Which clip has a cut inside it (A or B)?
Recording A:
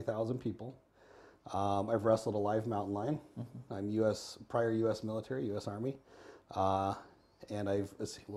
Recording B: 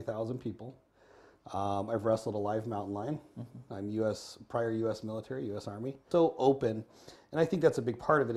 B